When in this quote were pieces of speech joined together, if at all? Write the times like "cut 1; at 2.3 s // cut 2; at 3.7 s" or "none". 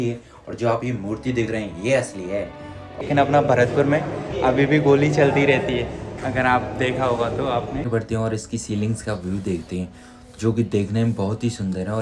cut 1; at 3.0 s // cut 2; at 7.9 s